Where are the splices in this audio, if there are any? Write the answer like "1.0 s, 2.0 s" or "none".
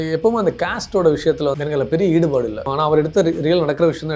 1.6 s, 2.7 s